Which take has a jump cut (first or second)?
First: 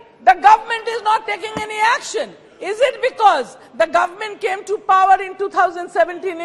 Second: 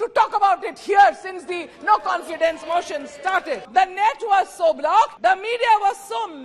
second